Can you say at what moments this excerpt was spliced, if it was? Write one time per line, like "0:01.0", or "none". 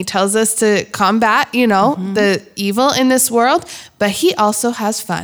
none